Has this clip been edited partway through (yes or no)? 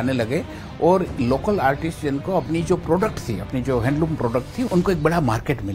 yes